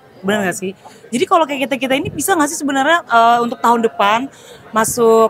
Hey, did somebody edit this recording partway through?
no; 0 cuts

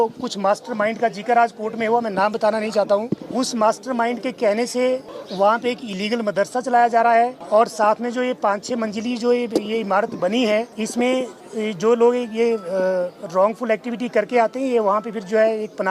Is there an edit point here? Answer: yes; 5 cuts; at 3.2 s, 5.2 s, 7.4 s, 10.7 s, 11.4 s

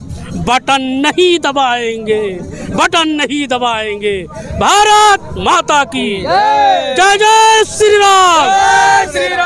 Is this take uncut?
yes; 0 cuts

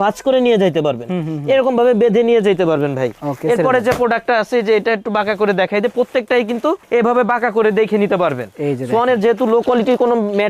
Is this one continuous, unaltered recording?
yes; 0 cuts

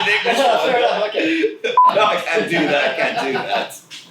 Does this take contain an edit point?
yes; 1 cut; at 1.9 s

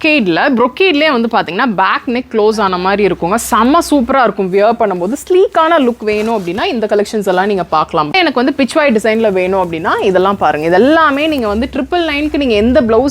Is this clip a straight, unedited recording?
no; 1 cut; at 8.1 s

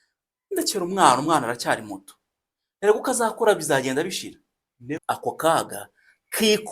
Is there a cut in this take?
yes; 1 cut; at 5.0 s

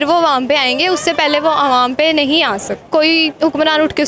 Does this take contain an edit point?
yes; 1 cut; at 2.8 s

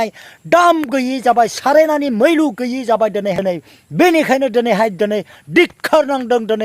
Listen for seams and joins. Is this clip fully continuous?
no; 1 cut; at 3.4 s

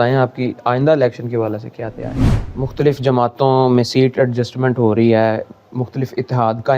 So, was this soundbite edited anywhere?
yes; 1 cut; at 2.3 s

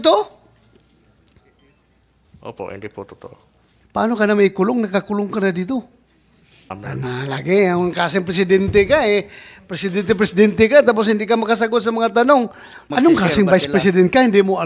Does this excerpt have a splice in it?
yes; 2 cuts; at 6.8 s, 12.8 s

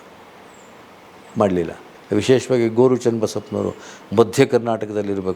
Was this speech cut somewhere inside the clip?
yes; 1 cut; at 1.9 s

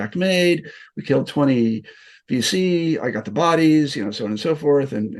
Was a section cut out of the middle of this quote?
no; 0 cuts

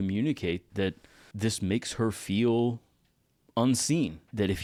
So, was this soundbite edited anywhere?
no; 0 cuts

